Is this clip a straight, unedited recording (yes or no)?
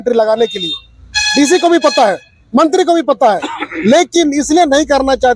yes